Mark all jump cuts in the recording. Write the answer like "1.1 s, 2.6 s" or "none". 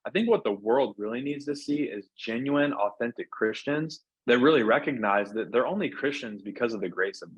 4.0 s